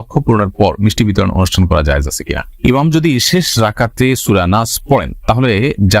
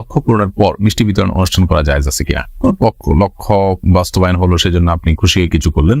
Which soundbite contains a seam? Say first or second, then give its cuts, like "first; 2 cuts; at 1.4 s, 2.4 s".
first; 1 cut; at 2.5 s